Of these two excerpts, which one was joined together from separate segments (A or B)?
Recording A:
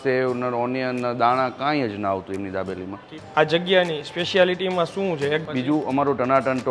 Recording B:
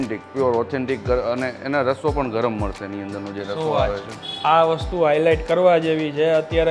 A